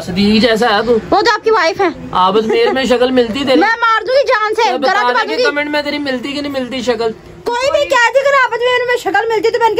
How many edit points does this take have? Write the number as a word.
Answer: one